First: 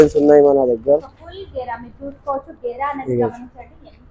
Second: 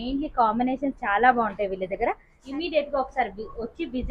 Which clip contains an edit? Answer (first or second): second